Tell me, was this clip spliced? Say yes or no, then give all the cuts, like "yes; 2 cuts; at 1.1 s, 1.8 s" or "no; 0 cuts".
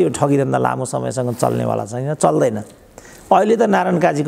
no; 0 cuts